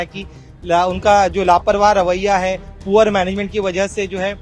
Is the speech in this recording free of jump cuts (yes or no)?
yes